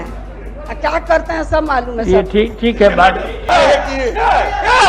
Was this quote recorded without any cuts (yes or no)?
no